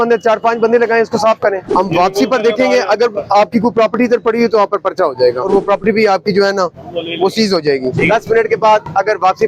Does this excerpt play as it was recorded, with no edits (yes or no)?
no